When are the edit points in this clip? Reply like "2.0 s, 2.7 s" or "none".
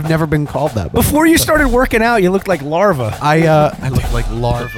none